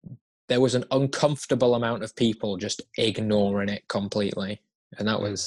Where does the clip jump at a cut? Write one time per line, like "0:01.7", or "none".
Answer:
none